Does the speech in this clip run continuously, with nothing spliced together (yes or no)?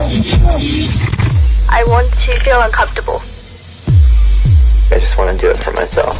no